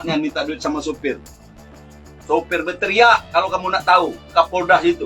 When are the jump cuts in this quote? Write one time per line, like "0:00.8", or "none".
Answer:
none